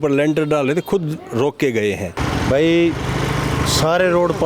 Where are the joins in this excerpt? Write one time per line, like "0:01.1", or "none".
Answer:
0:02.2